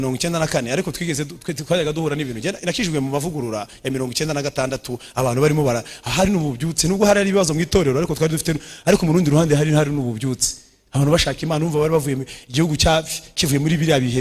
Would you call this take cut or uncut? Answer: uncut